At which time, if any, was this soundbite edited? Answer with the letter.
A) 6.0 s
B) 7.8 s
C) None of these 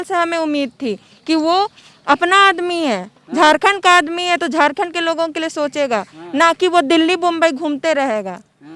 C